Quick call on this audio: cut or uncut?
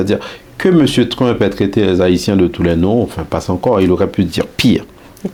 uncut